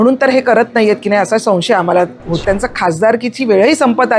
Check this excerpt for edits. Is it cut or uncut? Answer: cut